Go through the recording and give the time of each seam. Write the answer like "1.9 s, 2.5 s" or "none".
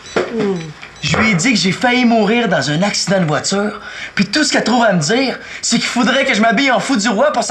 none